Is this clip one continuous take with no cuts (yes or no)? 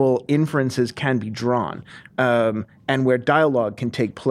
yes